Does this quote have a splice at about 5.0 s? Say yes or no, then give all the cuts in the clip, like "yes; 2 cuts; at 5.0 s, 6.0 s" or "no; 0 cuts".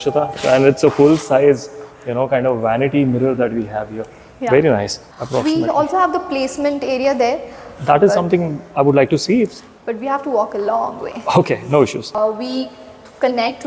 yes; 2 cuts; at 5.0 s, 12.1 s